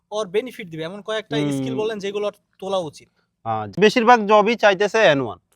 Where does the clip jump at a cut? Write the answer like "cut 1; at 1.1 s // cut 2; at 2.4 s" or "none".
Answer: cut 1; at 3.8 s

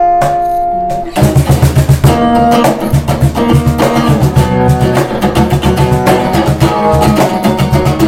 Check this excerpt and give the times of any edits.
none

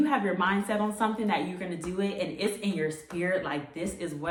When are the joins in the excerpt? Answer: none

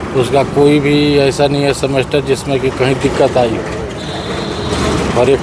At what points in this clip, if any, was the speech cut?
none

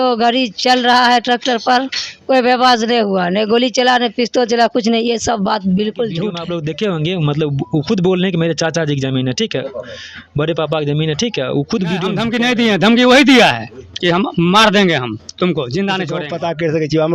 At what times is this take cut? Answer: cut 1; at 6.4 s // cut 2; at 12.2 s // cut 3; at 16.2 s

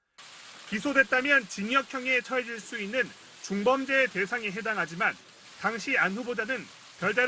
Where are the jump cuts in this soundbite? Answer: none

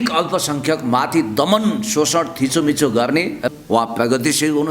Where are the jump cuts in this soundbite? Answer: cut 1; at 3.5 s

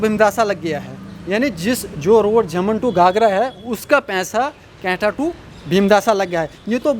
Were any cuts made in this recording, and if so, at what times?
none

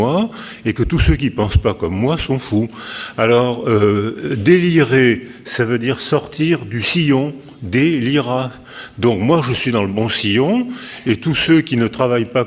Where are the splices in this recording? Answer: cut 1; at 6.8 s

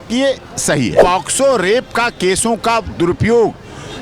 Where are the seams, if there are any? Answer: cut 1; at 1.0 s

